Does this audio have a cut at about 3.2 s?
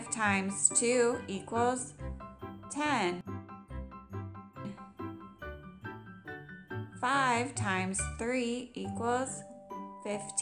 yes; 2 cuts; at 3.2 s, 6.9 s

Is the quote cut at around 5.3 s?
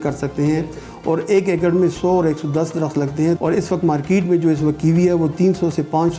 no; 1 cut; at 3.4 s

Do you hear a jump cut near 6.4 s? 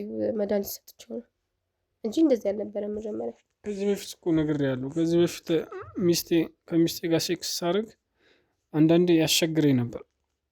no; 1 cut; at 3.5 s

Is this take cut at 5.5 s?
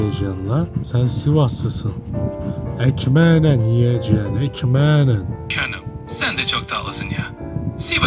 yes; 1 cut; at 5.5 s

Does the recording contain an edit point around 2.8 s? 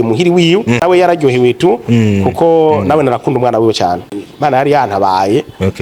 no; 2 cuts; at 0.8 s, 4.0 s

